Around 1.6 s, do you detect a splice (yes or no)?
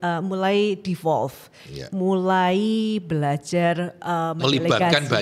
no